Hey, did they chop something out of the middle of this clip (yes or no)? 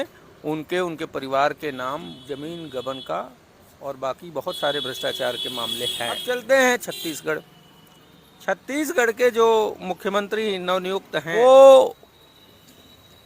yes